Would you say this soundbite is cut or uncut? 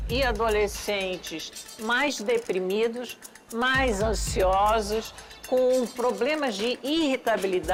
uncut